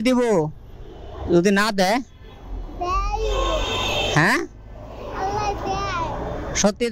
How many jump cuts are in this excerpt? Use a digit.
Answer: 0